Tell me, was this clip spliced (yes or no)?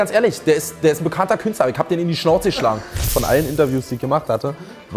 yes